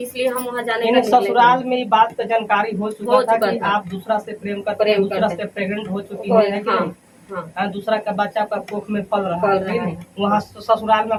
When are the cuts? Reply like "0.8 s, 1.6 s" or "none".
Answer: none